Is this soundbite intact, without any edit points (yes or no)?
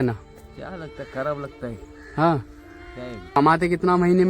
no